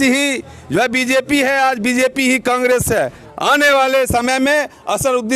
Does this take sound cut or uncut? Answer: cut